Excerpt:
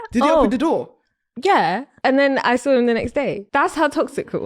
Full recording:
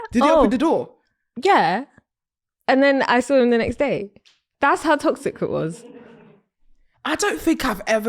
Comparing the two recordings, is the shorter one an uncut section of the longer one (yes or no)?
no